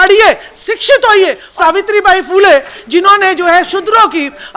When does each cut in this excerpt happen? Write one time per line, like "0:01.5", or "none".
0:01.4